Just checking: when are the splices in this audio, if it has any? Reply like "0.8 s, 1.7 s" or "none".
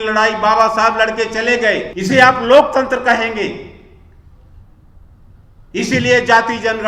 1.9 s